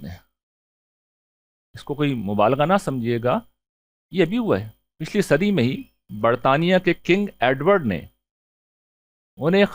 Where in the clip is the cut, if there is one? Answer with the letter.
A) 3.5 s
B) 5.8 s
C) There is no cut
C